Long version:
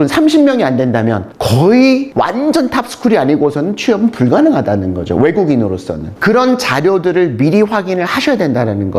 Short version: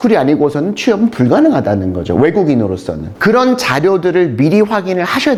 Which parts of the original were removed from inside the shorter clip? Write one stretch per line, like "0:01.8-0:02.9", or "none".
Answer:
none